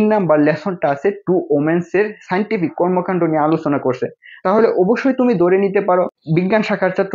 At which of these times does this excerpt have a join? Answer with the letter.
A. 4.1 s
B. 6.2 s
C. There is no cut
B